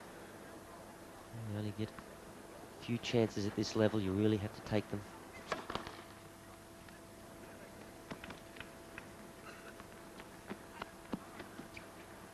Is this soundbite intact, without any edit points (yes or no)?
no